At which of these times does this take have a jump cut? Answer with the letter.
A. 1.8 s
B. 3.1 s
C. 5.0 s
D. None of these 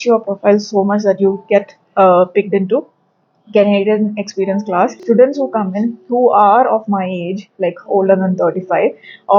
C